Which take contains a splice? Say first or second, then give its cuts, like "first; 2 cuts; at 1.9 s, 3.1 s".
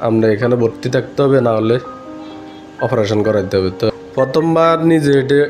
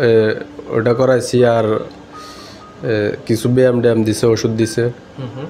first; 1 cut; at 3.9 s